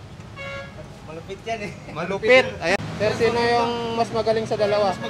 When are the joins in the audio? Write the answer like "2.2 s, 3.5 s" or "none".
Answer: 2.8 s